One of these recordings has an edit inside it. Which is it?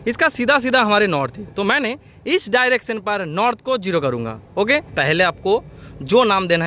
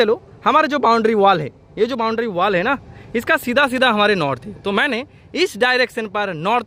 first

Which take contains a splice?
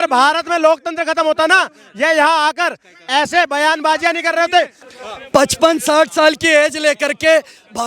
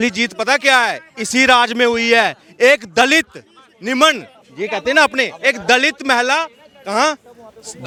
first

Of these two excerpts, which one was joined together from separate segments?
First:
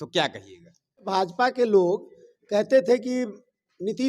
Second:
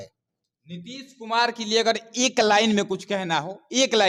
first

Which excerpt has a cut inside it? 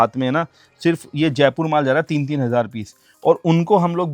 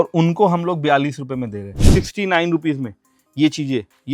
second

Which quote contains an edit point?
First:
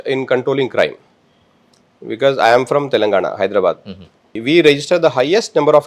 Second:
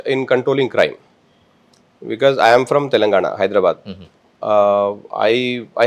first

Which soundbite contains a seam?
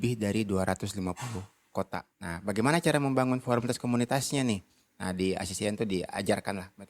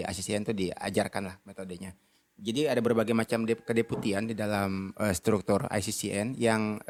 first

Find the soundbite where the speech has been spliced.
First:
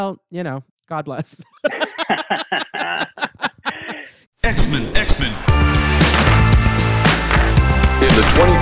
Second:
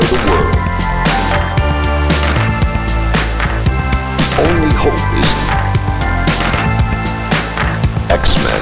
first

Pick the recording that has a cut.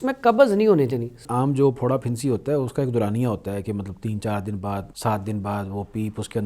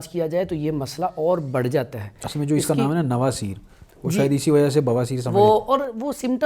first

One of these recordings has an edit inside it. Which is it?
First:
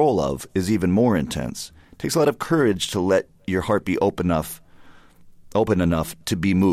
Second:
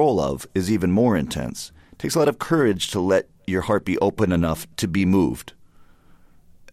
second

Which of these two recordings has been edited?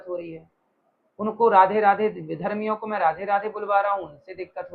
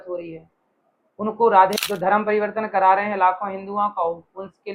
second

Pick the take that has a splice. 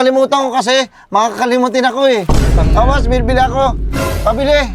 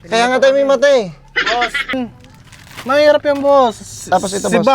second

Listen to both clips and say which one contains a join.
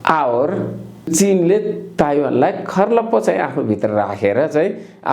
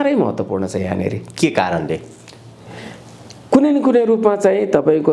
first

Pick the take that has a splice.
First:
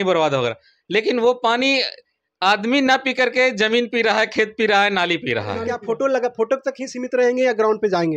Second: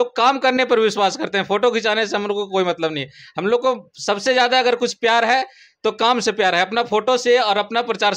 first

